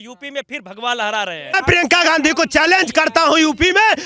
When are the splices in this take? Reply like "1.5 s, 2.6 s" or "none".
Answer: 1.6 s